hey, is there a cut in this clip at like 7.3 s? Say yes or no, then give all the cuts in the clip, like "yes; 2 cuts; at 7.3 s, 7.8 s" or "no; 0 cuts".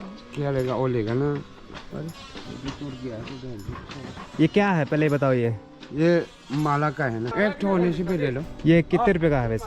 yes; 1 cut; at 7.3 s